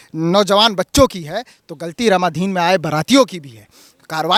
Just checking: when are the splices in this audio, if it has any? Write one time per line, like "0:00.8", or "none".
none